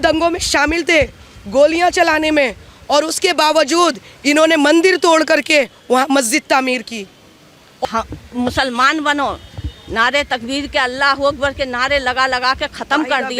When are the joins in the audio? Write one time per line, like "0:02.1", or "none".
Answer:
0:07.8